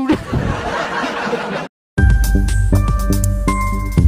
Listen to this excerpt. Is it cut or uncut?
cut